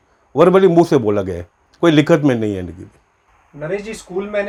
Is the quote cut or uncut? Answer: uncut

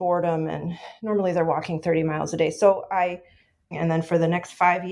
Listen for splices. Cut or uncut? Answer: cut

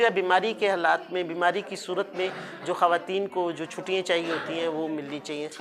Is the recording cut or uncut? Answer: uncut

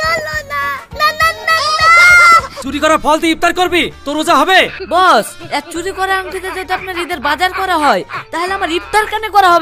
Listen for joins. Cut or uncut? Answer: cut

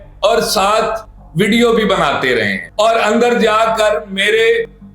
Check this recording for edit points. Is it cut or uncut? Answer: cut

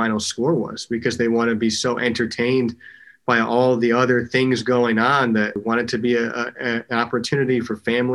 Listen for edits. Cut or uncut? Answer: cut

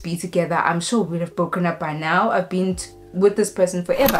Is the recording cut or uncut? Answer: uncut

